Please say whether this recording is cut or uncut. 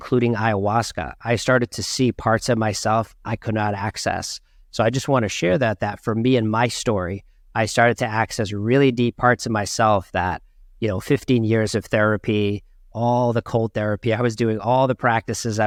uncut